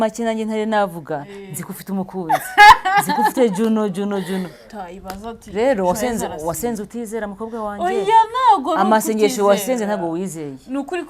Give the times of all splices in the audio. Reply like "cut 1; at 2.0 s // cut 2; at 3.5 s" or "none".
cut 1; at 4.6 s

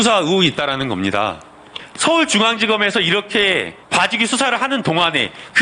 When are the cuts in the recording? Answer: cut 1; at 3.8 s

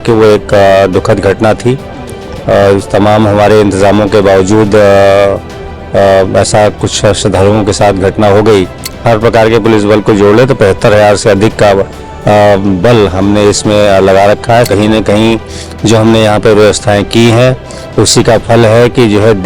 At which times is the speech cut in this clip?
cut 1; at 8.9 s // cut 2; at 14.7 s

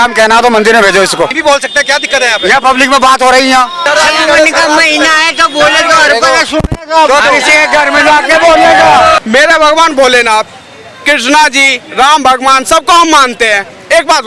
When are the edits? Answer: cut 1; at 1.4 s // cut 2; at 3.8 s // cut 3; at 9.2 s

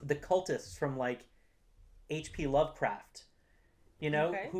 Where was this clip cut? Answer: none

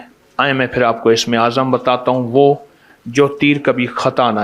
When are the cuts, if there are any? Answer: none

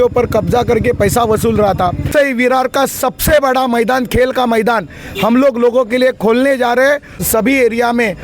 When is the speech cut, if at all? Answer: cut 1; at 2.1 s // cut 2; at 7.2 s

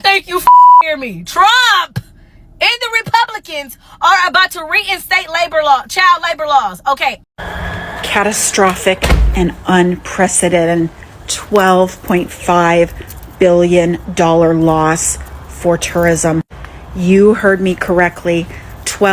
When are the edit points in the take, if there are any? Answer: cut 1; at 7.2 s

